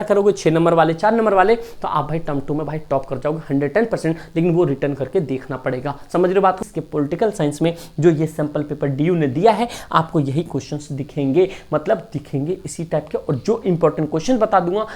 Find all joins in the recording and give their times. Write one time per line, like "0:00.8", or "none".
0:06.6